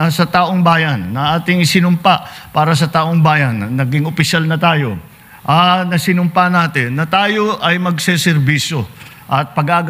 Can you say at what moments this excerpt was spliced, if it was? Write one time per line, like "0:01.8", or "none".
none